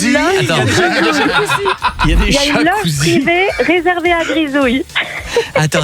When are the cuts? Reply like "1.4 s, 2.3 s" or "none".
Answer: none